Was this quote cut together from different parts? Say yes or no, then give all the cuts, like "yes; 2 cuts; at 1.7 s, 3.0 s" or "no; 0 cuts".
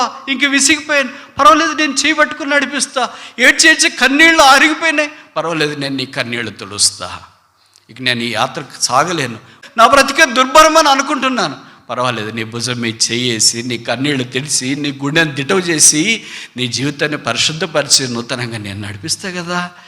yes; 1 cut; at 9.6 s